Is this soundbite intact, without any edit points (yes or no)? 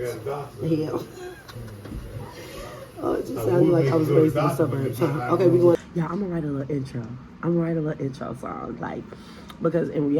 no